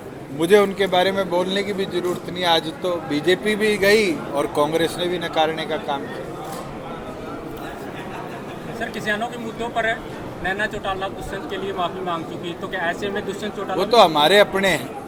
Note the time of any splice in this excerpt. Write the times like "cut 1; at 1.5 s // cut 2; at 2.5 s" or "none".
none